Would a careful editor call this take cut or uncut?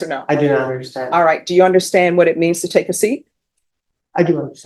uncut